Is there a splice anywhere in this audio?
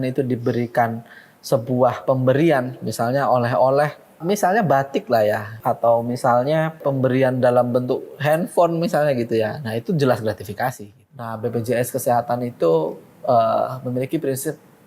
yes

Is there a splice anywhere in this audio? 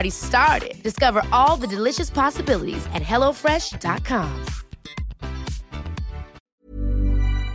yes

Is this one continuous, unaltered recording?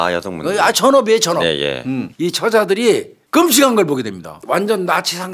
no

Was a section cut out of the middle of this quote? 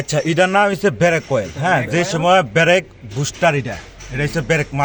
no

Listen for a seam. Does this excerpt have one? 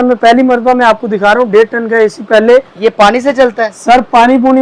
no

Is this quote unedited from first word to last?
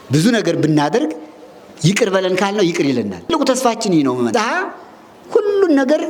no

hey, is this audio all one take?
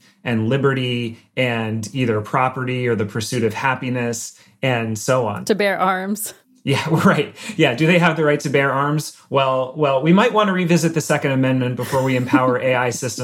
yes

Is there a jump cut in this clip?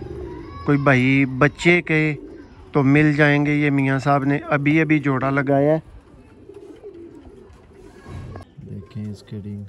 yes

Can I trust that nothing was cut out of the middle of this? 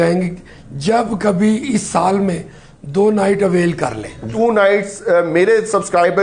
no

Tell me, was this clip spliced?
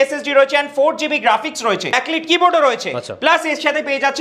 yes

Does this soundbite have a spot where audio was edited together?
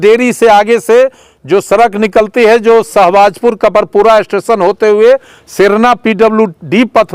no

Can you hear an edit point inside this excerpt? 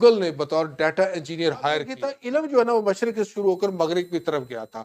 yes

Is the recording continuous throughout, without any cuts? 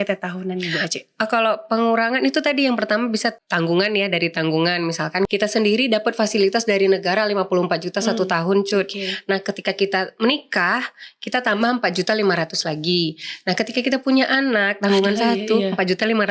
no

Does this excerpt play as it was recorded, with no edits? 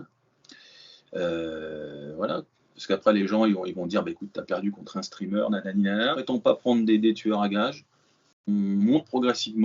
no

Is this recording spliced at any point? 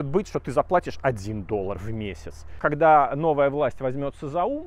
yes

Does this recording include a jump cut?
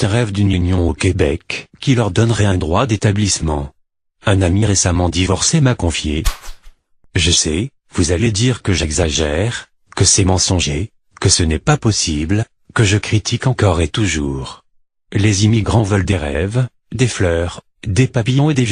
no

